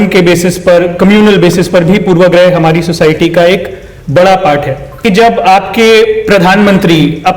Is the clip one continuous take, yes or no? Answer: no